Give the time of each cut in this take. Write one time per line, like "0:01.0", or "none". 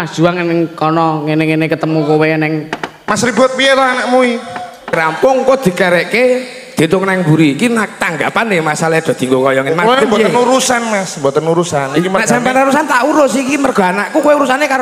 0:04.9